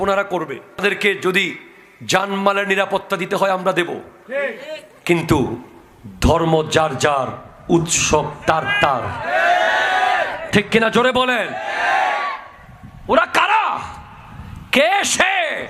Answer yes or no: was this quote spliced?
no